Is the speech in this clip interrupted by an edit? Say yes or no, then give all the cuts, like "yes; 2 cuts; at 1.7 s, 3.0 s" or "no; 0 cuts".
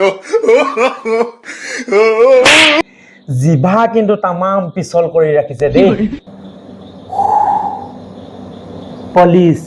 yes; 1 cut; at 2.8 s